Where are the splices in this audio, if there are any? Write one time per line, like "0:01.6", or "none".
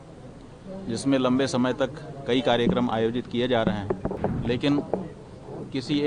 0:04.2